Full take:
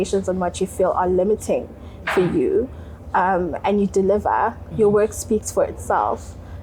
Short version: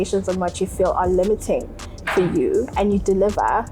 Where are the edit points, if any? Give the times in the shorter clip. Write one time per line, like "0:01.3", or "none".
0:02.7